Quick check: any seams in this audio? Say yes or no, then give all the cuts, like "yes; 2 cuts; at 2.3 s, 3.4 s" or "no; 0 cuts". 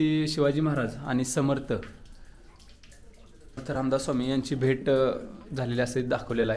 yes; 1 cut; at 3.6 s